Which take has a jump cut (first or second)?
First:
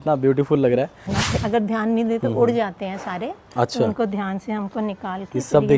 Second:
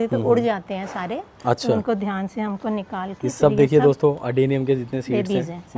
first